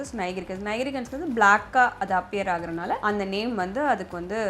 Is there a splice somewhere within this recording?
yes; 1 cut; at 3.0 s

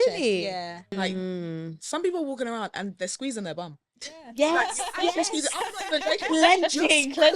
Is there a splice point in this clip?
yes; 1 cut; at 0.9 s

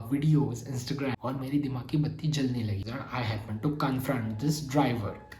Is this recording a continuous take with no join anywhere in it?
no; 2 cuts; at 1.2 s, 2.8 s

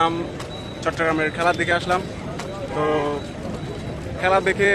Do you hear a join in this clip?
no; 0 cuts

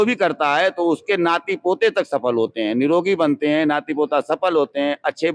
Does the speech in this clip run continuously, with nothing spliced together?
yes; 0 cuts

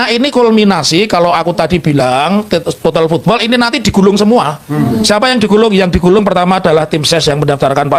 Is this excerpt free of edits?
yes; 0 cuts

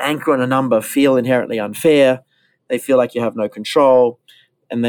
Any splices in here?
no; 0 cuts

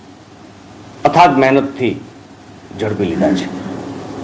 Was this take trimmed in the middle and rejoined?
yes; 1 cut; at 1.9 s

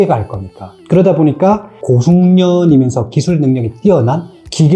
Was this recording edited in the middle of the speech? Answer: yes; 1 cut; at 1.7 s

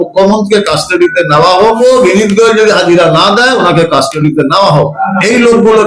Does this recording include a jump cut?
yes; 2 cuts; at 1.8 s, 5.0 s

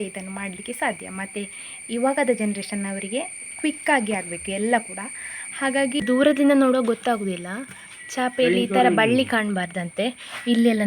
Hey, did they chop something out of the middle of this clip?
yes; 1 cut; at 6.0 s

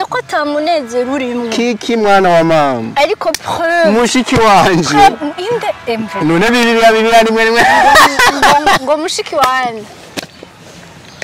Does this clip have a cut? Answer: no; 0 cuts

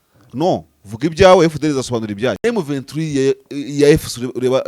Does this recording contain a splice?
yes; 1 cut; at 2.4 s

